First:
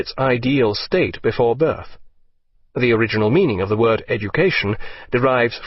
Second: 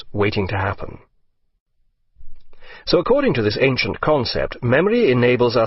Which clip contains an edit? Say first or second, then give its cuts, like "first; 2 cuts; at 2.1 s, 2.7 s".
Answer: first; 1 cut; at 3.1 s